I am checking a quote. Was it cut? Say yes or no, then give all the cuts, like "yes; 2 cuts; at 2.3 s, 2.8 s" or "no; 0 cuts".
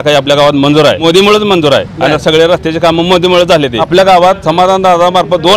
yes; 2 cuts; at 1.0 s, 3.8 s